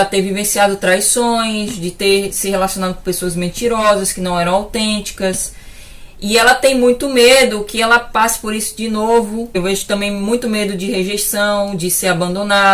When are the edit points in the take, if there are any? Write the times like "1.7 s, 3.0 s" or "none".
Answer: 9.5 s